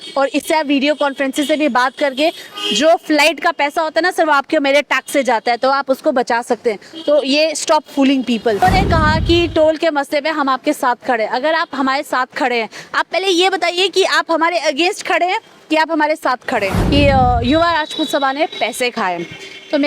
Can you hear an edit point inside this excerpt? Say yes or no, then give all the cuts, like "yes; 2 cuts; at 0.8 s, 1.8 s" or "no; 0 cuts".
yes; 2 cuts; at 8.6 s, 16.8 s